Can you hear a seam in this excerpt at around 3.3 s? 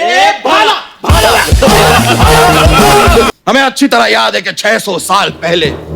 yes; 1 cut; at 3.3 s

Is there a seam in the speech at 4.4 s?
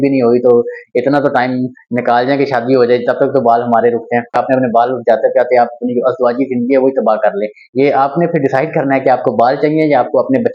yes; 1 cut; at 4.4 s

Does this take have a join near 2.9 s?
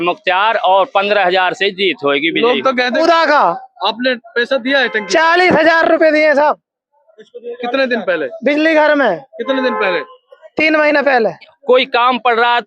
yes; 2 cuts; at 2.9 s, 11.5 s

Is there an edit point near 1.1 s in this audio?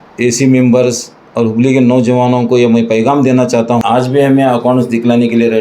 no; 1 cut; at 3.8 s

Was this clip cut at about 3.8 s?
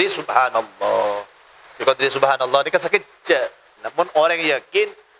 yes; 1 cut; at 3.8 s

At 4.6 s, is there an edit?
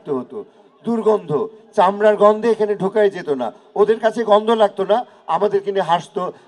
no; 0 cuts

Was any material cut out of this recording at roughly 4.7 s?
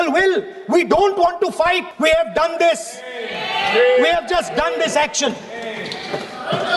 no; 1 cut; at 1.9 s

